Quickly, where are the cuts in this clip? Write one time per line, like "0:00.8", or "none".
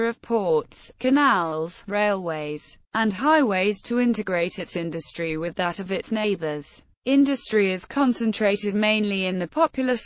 0:08.2